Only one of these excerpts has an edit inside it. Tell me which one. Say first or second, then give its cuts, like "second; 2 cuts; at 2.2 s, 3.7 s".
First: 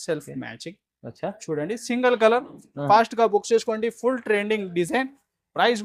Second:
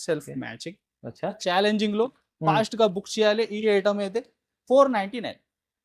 second; 1 cut; at 1.4 s